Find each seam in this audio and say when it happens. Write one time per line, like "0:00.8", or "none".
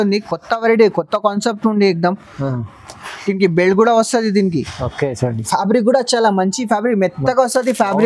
none